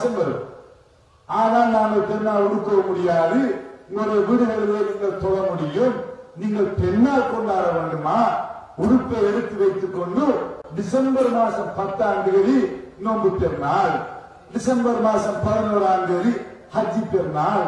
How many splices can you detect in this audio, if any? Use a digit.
0